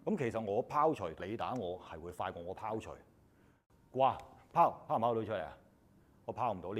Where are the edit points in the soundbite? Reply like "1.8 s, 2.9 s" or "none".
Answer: 1.2 s, 3.5 s